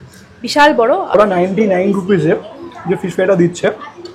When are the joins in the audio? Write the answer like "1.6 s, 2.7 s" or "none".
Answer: 1.1 s

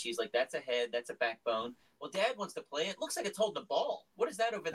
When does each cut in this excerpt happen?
none

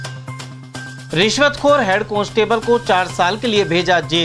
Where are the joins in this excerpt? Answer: 1.0 s

